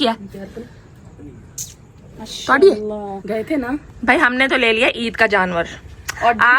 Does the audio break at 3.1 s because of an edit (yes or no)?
yes